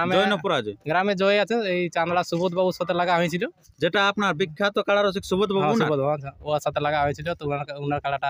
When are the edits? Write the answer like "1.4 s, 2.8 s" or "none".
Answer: none